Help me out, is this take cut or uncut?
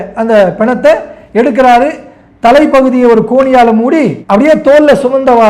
uncut